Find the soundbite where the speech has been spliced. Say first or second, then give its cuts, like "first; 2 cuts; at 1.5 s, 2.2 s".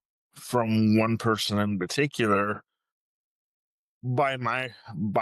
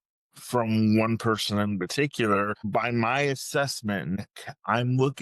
second; 2 cuts; at 2.7 s, 4.2 s